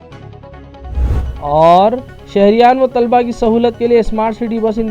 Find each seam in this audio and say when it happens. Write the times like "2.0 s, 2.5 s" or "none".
1.0 s

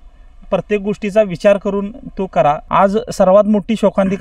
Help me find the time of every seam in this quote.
2.6 s

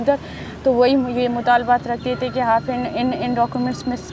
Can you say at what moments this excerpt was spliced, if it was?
none

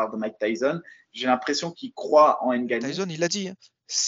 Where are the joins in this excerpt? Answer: 2.9 s

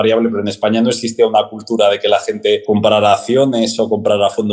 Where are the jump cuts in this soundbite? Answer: 2.6 s

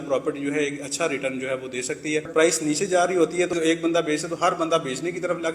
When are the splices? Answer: 2.3 s, 3.5 s

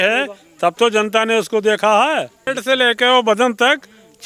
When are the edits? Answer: 2.5 s

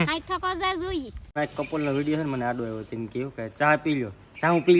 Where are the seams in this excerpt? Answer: 1.2 s

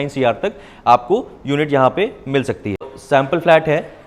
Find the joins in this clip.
2.9 s

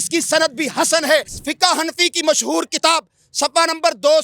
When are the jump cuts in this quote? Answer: 1.3 s

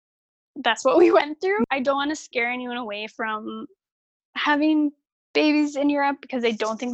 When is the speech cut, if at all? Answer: 1.6 s

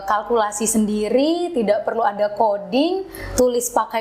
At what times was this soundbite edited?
none

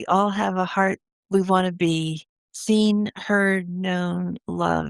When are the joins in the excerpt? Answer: 1.1 s

